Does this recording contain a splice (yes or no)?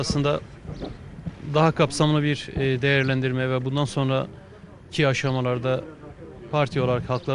no